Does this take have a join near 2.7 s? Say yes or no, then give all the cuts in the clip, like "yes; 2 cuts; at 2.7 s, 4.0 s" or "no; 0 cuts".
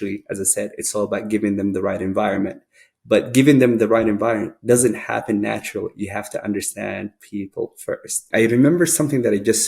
no; 1 cut; at 8.2 s